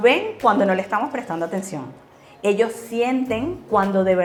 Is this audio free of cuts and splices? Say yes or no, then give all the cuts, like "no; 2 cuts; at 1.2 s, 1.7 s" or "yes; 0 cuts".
yes; 0 cuts